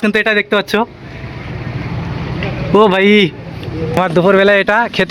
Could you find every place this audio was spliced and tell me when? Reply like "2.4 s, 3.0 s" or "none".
4.0 s